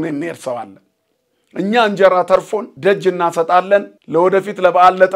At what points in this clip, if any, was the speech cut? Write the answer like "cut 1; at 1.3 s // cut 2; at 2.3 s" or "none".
cut 1; at 2.6 s // cut 2; at 4.0 s

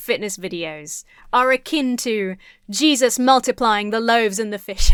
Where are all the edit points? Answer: none

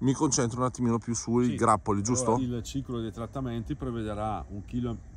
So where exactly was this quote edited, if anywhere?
cut 1; at 2.4 s

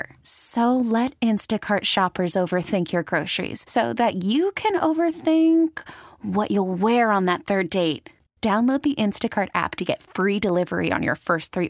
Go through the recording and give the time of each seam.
none

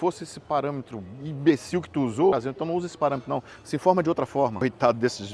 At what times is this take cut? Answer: cut 1; at 2.3 s // cut 2; at 4.6 s

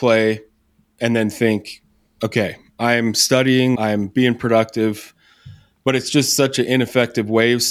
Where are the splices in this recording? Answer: cut 1; at 3.8 s

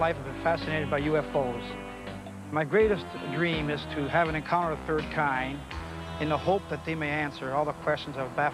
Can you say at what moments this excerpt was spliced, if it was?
cut 1; at 6.0 s

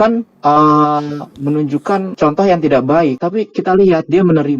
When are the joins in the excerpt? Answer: cut 1; at 2.1 s // cut 2; at 3.2 s

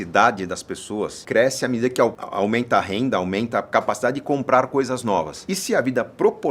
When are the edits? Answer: cut 1; at 1.2 s // cut 2; at 2.2 s // cut 3; at 5.4 s

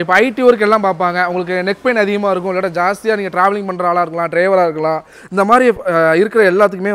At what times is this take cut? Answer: none

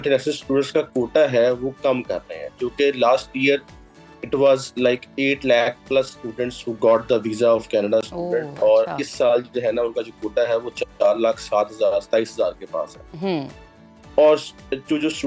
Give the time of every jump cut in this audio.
none

